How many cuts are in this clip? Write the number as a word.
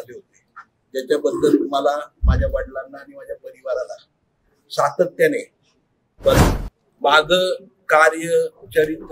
one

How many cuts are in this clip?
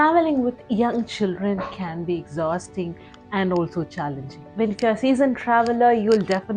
one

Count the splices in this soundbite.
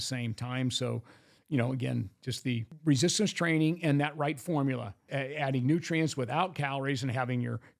two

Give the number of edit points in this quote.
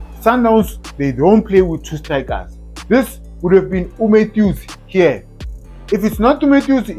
zero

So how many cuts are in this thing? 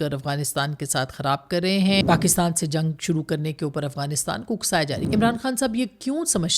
two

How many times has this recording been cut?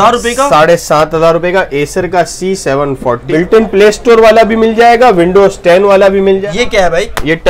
two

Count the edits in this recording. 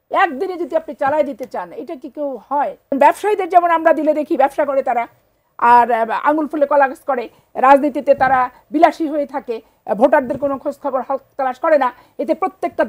one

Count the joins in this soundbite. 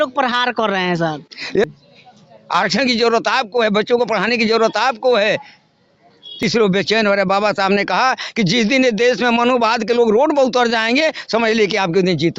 two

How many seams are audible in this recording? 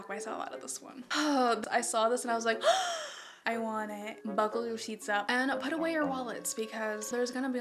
three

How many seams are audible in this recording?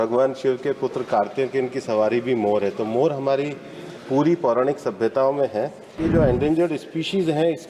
one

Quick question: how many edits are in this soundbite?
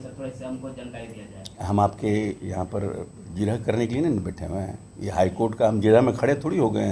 zero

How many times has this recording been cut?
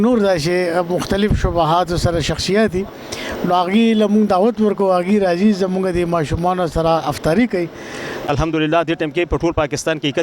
one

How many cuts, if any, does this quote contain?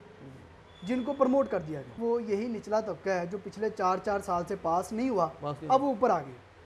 one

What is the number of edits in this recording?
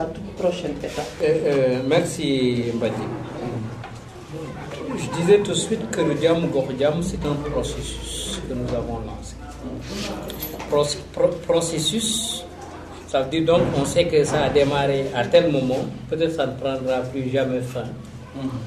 one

